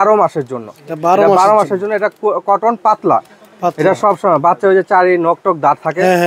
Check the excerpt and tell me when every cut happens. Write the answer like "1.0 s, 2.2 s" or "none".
none